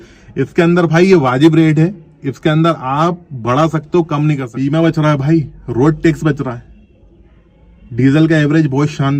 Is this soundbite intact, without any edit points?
no; 1 cut; at 4.5 s

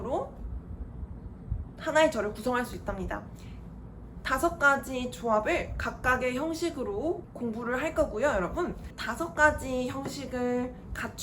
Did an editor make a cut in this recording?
yes; 2 cuts; at 7.3 s, 8.9 s

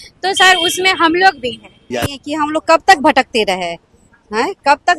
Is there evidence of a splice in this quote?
yes; 1 cut; at 2.3 s

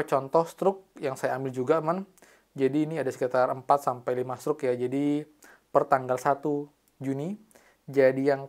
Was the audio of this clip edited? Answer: no; 0 cuts

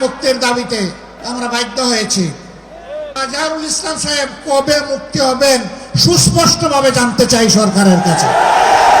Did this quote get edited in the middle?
yes; 2 cuts; at 1.1 s, 3.2 s

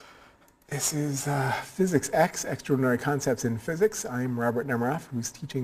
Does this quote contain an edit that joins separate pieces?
yes; 1 cut; at 1.2 s

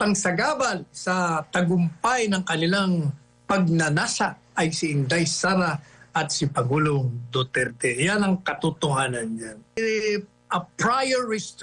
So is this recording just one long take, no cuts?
no; 1 cut; at 9.8 s

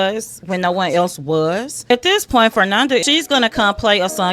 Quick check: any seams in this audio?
yes; 2 cuts; at 1.8 s, 3.0 s

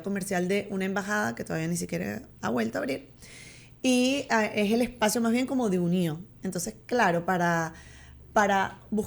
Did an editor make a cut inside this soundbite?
no; 0 cuts

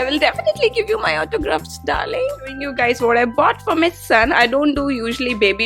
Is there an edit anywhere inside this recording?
yes; 1 cut; at 2.7 s

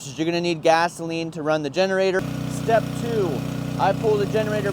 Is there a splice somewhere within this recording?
yes; 1 cut; at 2.3 s

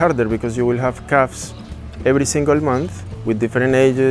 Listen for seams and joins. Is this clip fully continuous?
yes; 0 cuts

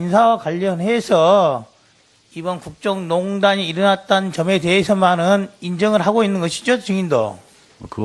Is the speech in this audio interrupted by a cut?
yes; 1 cut; at 3.4 s

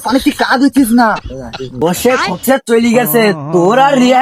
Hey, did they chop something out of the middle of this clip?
yes; 1 cut; at 1.7 s

